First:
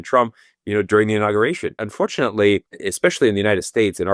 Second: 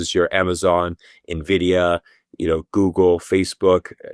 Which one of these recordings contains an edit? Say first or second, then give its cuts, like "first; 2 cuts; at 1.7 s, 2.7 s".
first; 2 cuts; at 1.8 s, 2.8 s